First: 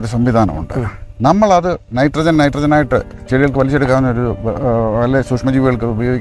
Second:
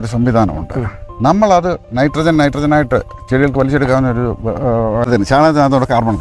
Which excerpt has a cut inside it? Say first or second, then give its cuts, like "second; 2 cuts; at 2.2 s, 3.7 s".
second; 1 cut; at 5.1 s